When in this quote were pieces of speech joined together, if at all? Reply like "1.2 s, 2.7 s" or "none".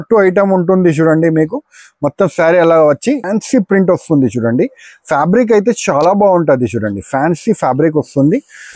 3.2 s